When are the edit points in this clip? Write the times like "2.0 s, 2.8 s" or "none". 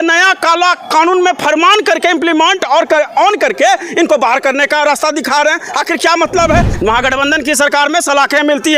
6.7 s